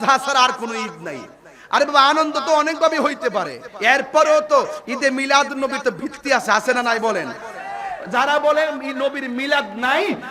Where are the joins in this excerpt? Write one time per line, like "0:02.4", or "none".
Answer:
0:03.6